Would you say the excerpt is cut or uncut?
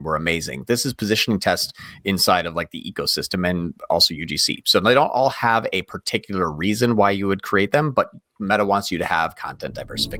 uncut